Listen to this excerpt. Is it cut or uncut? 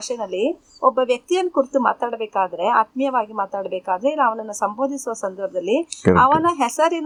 uncut